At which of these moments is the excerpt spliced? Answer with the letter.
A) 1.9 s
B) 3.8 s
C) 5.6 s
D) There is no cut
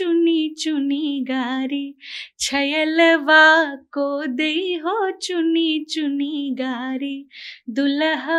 D